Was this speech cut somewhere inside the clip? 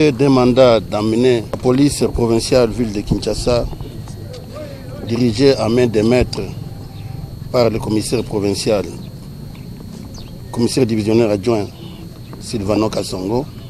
yes; 1 cut; at 1.5 s

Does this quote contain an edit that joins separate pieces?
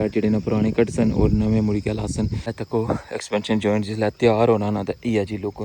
yes; 1 cut; at 2.5 s

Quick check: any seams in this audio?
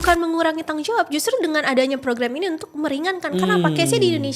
no; 0 cuts

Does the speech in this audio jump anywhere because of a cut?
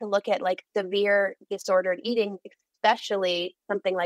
no; 0 cuts

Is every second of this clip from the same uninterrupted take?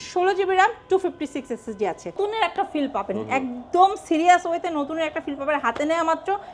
no; 1 cut; at 2.1 s

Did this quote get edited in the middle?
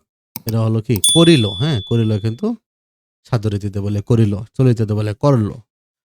no; 0 cuts

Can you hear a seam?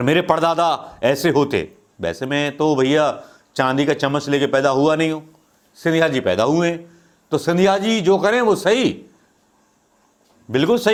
no; 0 cuts

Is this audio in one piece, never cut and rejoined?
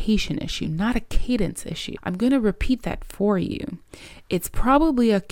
no; 1 cut; at 1.9 s

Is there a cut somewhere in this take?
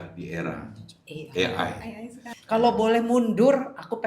yes; 1 cut; at 2.2 s

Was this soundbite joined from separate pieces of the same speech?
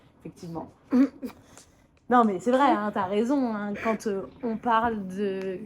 no; 0 cuts

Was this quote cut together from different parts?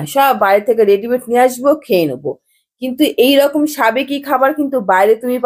no; 0 cuts

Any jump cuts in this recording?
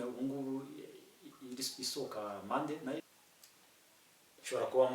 yes; 1 cut; at 3.0 s

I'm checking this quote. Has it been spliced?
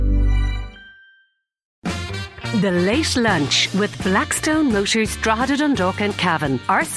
yes; 1 cut; at 1.8 s

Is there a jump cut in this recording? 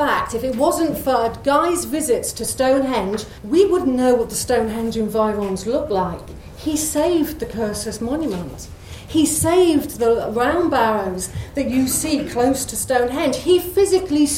yes; 1 cut; at 3.3 s

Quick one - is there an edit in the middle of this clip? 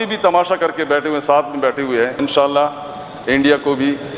yes; 1 cut; at 2.2 s

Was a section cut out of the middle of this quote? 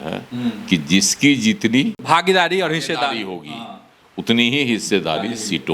yes; 1 cut; at 2.0 s

